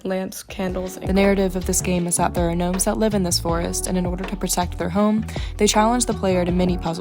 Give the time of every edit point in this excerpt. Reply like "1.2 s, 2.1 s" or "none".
0.9 s